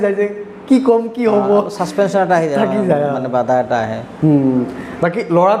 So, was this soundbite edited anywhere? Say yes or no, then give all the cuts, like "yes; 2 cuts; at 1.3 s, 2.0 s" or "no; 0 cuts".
no; 0 cuts